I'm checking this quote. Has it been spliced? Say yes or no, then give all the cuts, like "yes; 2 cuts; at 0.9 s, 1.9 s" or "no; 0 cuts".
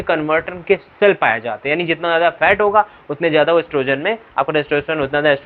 no; 0 cuts